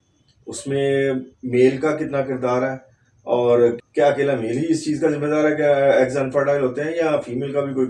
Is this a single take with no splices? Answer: yes; 0 cuts

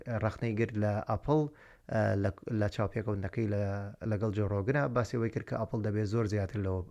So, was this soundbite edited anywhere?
no; 0 cuts

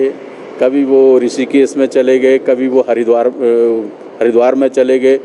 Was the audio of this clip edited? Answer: no; 0 cuts

